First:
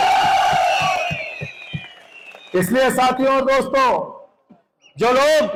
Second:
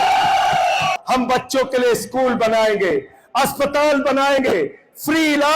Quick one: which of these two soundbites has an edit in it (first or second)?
second